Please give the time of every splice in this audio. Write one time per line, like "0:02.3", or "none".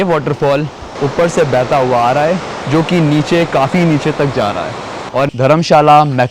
0:05.3